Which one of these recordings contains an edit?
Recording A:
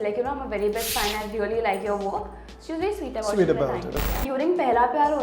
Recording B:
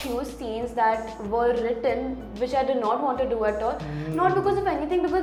A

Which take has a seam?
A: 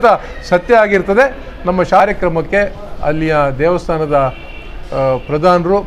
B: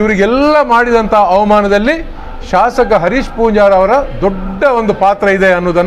A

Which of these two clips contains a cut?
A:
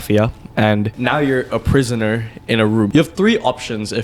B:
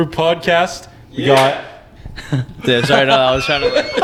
A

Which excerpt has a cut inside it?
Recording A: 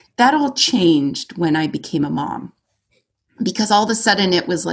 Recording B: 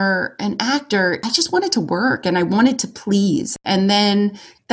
B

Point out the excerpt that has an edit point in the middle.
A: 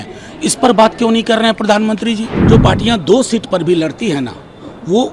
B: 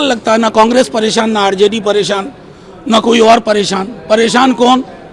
A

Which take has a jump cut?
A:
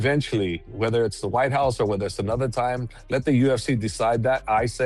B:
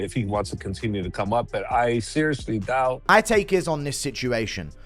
B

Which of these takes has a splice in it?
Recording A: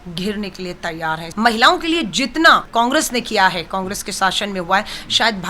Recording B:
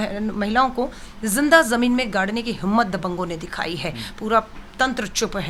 A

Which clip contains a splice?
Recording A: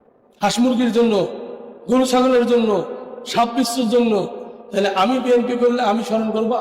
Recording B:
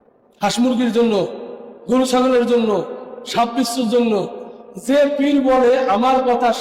A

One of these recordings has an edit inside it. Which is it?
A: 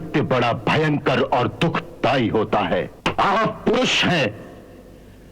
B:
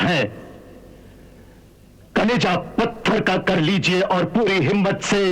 A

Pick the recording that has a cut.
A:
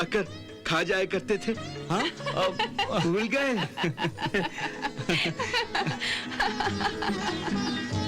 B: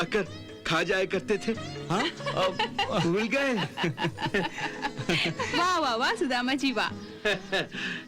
B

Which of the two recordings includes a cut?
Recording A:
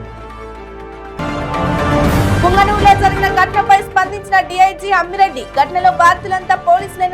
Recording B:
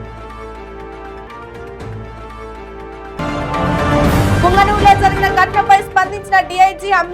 A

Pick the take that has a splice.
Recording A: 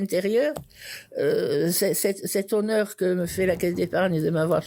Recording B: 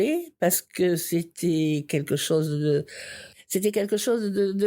B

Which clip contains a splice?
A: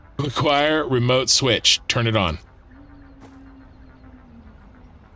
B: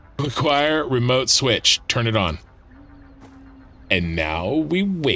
B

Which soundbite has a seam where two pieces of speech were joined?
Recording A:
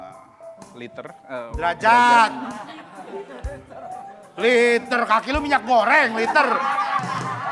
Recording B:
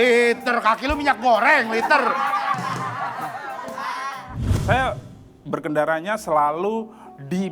B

